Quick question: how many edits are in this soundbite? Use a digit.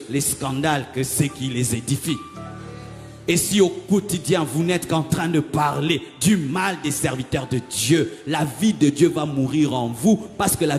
0